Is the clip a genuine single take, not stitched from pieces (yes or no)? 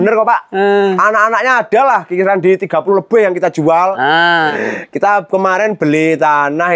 no